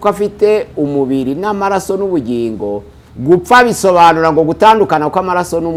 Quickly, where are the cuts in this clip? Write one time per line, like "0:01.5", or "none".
none